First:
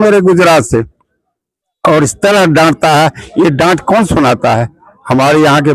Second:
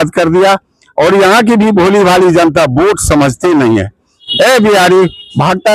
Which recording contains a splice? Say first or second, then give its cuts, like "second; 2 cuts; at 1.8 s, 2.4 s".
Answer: second; 1 cut; at 4.2 s